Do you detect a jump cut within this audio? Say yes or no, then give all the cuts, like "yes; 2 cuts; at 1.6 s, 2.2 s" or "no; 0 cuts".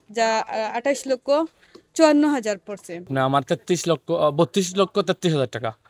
yes; 1 cut; at 3.1 s